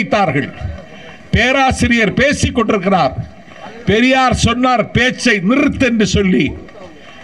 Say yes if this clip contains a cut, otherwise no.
no